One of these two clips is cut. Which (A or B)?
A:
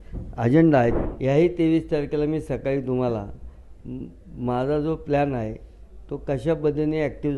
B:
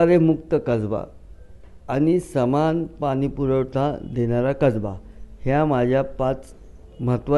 A